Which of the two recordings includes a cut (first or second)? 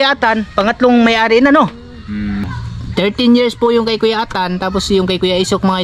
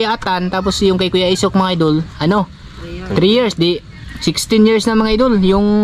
first